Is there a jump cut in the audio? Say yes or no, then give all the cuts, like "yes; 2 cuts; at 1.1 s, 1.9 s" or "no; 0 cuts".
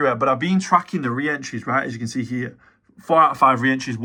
no; 0 cuts